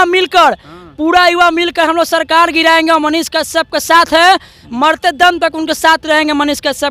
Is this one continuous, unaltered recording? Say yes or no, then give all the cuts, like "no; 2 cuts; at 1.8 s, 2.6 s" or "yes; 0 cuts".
yes; 0 cuts